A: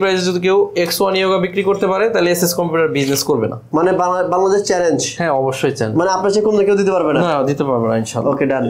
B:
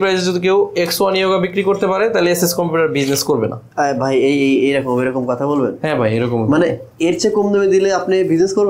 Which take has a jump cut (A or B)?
A